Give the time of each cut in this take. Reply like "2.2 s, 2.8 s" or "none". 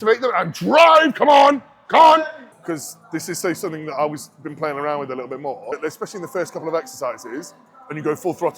2.6 s, 5.7 s